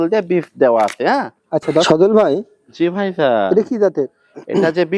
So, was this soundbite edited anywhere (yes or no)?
yes